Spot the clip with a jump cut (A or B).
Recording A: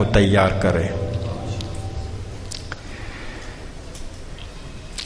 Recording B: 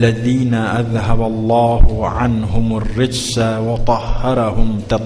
A